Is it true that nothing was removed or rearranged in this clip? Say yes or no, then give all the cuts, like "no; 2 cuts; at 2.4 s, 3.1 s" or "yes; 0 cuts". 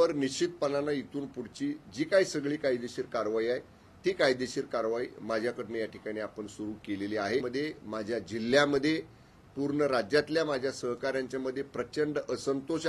no; 1 cut; at 7.5 s